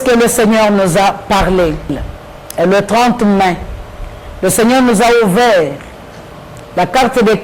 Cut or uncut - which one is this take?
uncut